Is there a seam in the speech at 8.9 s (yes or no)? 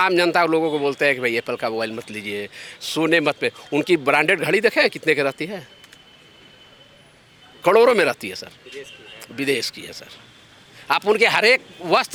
no